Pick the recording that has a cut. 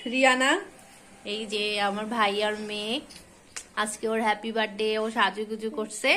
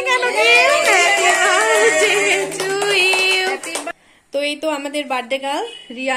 second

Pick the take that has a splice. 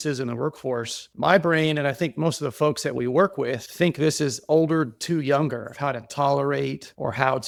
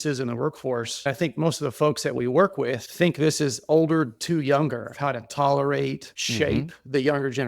second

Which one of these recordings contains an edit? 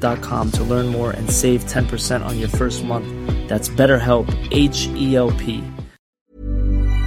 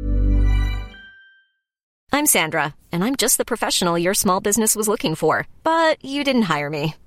second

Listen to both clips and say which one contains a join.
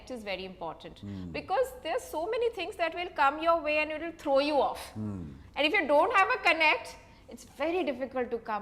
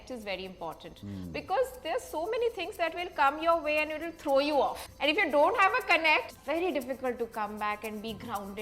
second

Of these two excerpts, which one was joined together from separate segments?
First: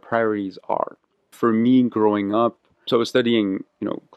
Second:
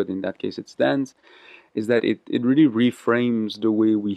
first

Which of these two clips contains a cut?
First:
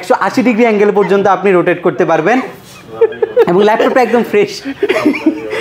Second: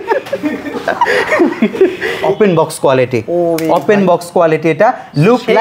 second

